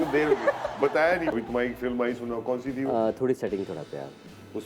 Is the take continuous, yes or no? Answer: no